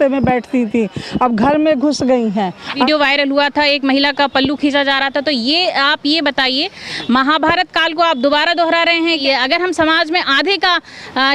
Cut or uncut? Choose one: cut